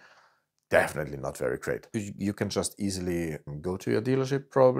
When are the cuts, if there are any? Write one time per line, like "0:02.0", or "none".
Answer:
0:01.9